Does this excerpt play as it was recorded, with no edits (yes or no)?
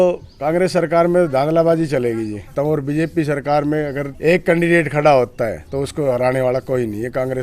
no